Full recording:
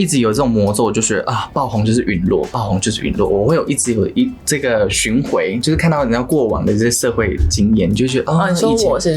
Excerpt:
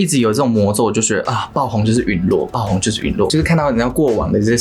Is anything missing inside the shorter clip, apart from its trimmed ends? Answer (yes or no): yes